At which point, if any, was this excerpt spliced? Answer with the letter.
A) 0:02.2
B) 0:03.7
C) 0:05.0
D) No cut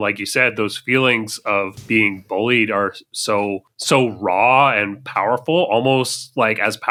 D